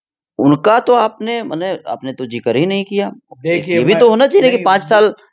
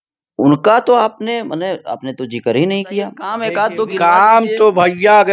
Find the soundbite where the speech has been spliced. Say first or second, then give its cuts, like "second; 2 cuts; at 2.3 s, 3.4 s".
second; 1 cut; at 3.3 s